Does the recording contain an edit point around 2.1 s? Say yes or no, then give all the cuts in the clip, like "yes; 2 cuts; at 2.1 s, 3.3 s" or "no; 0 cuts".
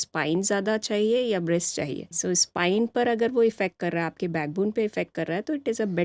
yes; 1 cut; at 2.1 s